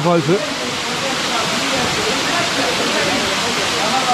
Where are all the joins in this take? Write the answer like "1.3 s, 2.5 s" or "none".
none